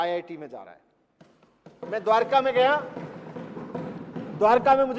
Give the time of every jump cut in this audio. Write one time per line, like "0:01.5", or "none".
none